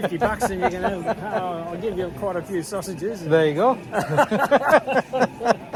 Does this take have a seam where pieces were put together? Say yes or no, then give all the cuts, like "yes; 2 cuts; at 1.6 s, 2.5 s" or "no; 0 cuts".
no; 0 cuts